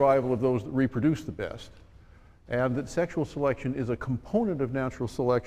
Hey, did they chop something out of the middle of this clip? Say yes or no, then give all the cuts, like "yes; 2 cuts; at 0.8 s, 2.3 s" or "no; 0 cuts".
yes; 1 cut; at 1.2 s